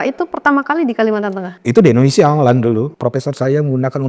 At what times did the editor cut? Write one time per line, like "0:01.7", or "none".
0:01.5
0:02.9